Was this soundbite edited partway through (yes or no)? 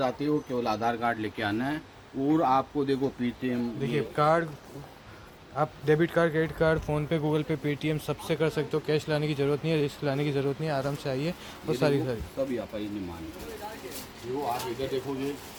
no